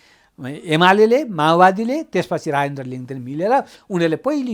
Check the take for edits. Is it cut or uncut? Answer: uncut